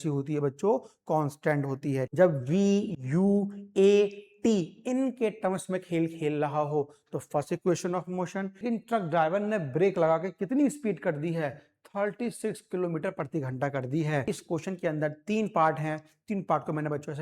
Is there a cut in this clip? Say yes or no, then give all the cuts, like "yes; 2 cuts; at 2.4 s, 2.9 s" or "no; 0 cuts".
yes; 3 cuts; at 2.0 s, 8.6 s, 14.2 s